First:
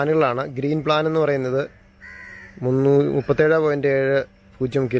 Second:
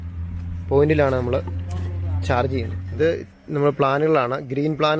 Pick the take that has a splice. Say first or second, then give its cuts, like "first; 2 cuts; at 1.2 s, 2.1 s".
second; 1 cut; at 2.9 s